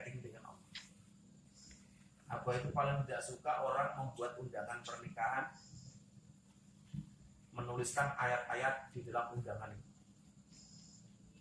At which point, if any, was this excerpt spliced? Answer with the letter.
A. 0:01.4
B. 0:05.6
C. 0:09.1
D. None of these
A